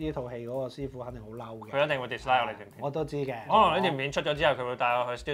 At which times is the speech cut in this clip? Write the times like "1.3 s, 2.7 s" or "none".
3.4 s

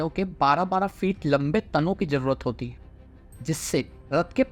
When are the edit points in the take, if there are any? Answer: none

